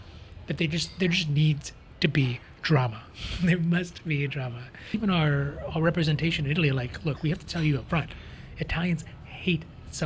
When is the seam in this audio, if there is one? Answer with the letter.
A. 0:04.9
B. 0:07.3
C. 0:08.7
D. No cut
A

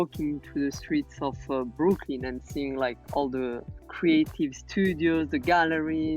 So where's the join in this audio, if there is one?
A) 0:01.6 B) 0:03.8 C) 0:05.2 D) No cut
B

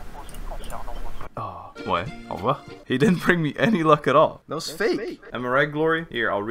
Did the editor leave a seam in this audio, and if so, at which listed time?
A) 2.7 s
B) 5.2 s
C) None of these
B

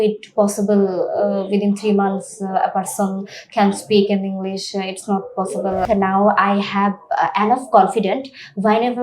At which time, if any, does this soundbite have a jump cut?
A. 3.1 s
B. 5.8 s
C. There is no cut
B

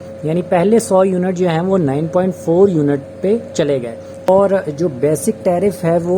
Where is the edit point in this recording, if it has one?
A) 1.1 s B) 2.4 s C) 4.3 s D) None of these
C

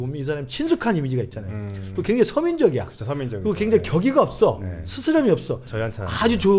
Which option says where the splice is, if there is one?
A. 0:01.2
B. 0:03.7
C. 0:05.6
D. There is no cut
D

